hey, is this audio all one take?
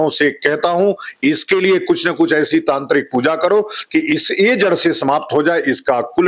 yes; 0 cuts

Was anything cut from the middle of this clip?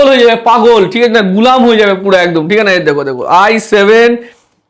no; 0 cuts

